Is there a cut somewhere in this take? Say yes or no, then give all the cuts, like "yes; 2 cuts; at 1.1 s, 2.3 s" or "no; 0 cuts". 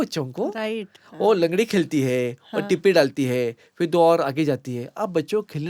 no; 0 cuts